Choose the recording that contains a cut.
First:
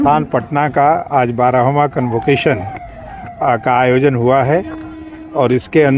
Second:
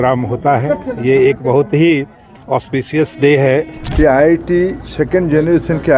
second; 1 cut; at 3.8 s

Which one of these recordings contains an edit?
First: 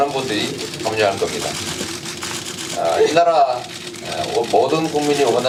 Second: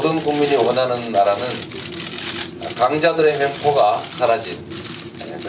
second; 1 cut; at 3.1 s

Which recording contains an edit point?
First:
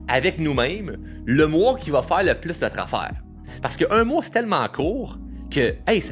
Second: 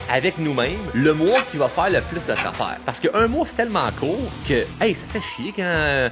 second; 3 cuts; at 0.8 s, 2.8 s, 4.3 s

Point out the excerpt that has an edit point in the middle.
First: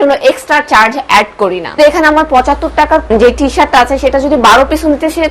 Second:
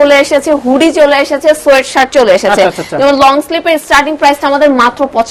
first; 2 cuts; at 1.8 s, 3.1 s

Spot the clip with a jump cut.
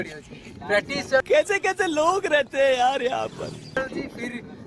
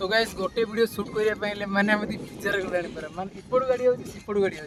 first; 2 cuts; at 1.2 s, 3.8 s

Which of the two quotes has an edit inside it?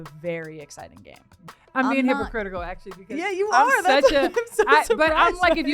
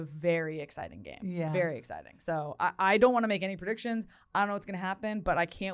first; 1 cut; at 1.3 s

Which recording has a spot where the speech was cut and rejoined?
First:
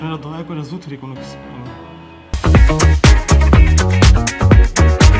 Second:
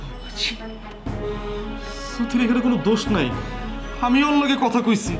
first; 1 cut; at 2.3 s

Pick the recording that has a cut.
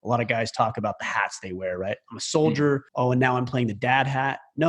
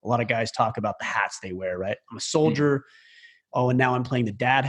first; 1 cut; at 2.9 s

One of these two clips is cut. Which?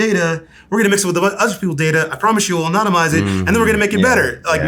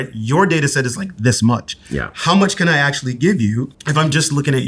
second; 1 cut; at 3.8 s

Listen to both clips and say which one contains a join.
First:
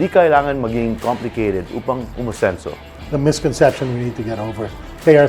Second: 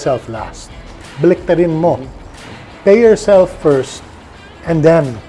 first; 1 cut; at 2.9 s

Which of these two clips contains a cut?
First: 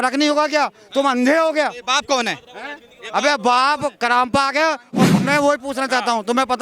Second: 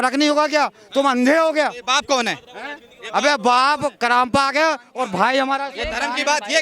first; 1 cut; at 5.2 s

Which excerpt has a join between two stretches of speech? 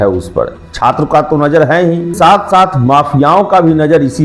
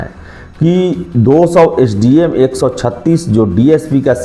first; 1 cut; at 2.1 s

